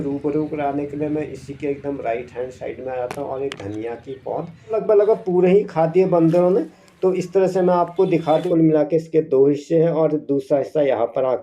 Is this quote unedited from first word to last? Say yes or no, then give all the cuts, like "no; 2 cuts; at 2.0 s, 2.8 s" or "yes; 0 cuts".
no; 2 cuts; at 4.7 s, 8.4 s